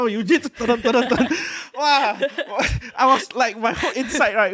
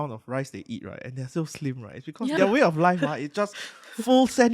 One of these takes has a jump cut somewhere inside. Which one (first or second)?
second